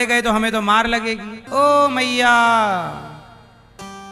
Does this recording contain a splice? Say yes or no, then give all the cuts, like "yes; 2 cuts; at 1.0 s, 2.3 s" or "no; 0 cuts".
yes; 1 cut; at 1.3 s